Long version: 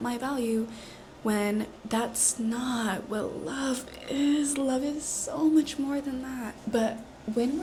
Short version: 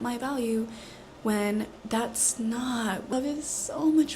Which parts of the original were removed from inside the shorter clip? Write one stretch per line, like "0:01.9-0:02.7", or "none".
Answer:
0:03.1-0:04.7